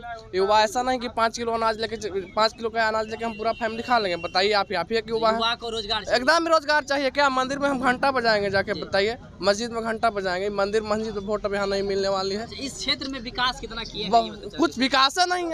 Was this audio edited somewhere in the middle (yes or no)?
no